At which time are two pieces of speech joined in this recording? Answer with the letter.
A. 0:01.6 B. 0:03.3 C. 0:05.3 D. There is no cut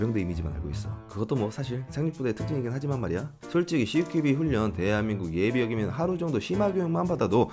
B